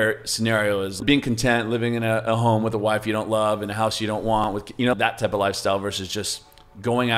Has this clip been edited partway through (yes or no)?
yes